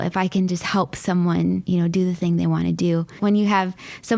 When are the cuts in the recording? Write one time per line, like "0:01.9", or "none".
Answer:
0:01.6
0:03.2